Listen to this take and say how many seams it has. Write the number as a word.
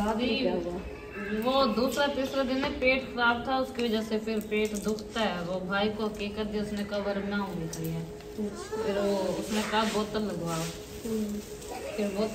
zero